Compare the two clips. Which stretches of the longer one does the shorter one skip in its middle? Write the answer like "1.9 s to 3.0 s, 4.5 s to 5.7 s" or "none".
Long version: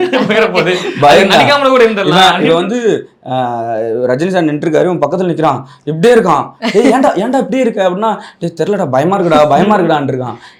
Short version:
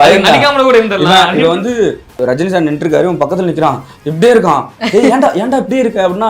3.2 s to 4.0 s